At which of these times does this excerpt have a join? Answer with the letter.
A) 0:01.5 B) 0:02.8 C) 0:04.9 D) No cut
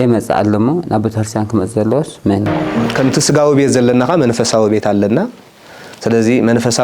B